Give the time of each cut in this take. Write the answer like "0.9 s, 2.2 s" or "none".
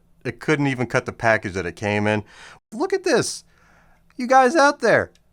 2.6 s